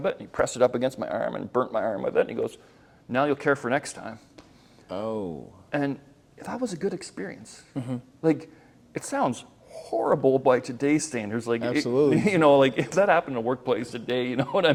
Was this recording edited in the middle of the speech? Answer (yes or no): no